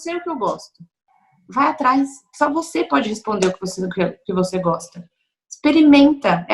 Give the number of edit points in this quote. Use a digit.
0